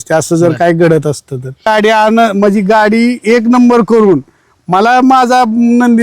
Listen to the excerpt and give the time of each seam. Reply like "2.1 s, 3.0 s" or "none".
1.7 s